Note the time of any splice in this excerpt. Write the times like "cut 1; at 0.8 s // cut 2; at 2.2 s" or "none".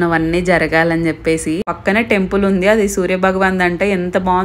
cut 1; at 1.7 s